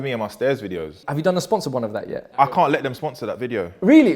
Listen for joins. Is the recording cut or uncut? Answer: cut